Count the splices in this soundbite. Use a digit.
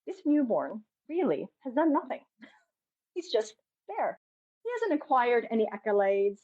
1